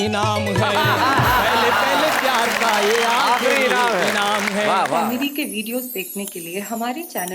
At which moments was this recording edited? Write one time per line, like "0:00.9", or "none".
0:05.0